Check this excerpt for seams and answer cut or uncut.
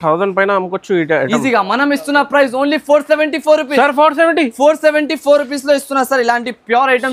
uncut